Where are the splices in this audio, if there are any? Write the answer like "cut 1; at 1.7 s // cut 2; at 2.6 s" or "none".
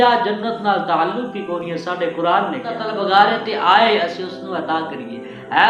cut 1; at 2.9 s